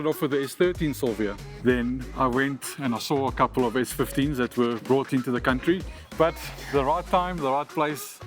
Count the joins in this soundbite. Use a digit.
2